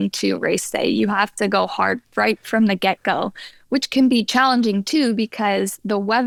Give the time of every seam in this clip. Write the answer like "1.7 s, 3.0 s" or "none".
none